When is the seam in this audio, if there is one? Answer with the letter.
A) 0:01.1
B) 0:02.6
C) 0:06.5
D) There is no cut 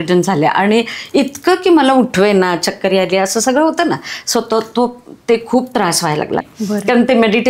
C